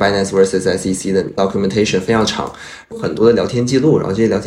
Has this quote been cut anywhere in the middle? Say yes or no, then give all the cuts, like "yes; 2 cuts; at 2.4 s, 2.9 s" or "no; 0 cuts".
yes; 2 cuts; at 1.3 s, 2.9 s